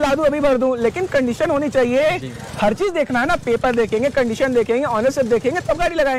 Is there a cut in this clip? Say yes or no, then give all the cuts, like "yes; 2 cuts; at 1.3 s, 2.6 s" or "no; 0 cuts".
no; 0 cuts